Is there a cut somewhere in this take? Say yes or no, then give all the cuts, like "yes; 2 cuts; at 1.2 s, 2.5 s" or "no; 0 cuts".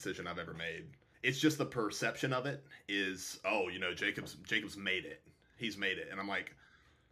yes; 1 cut; at 1.0 s